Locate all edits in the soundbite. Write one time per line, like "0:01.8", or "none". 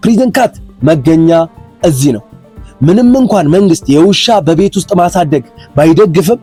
none

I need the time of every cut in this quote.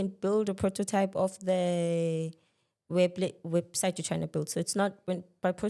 none

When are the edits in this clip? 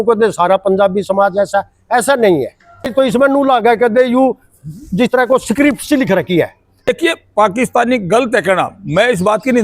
0:02.9
0:06.9

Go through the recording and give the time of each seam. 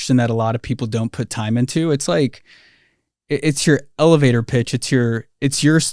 none

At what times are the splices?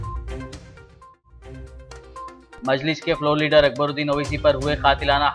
none

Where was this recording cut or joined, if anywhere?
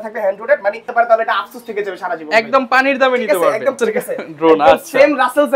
0:00.9
0:03.8

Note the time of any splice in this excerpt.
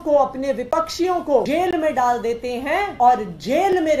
0:01.5
0:02.9

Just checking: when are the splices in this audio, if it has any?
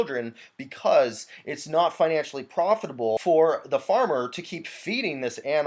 0:03.2

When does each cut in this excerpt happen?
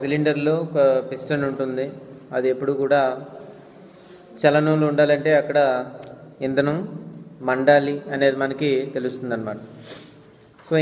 none

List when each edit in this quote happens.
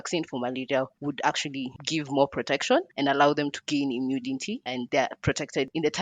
0:00.9
0:01.8
0:03.6
0:04.8

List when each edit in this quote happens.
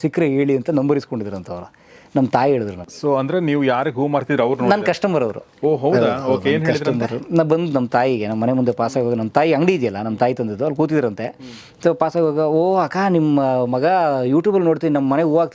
none

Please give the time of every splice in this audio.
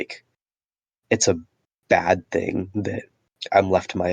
none

